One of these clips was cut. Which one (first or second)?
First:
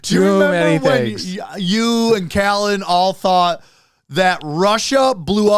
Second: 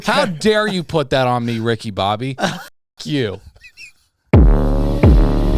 second